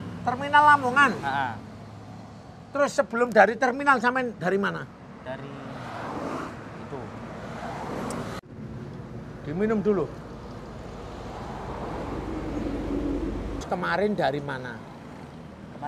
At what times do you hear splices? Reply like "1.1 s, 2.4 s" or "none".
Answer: 8.4 s, 13.6 s